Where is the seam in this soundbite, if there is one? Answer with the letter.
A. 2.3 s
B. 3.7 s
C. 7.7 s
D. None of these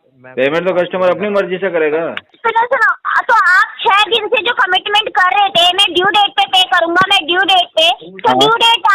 A